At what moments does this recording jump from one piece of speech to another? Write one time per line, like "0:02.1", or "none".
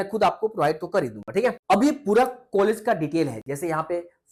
none